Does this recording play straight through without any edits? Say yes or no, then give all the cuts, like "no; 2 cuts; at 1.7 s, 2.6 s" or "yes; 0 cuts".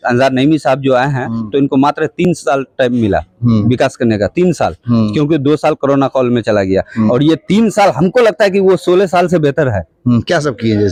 yes; 0 cuts